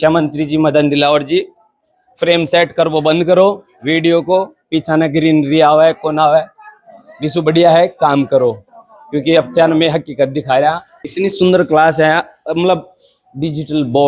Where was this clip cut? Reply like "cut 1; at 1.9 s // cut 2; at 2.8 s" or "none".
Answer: none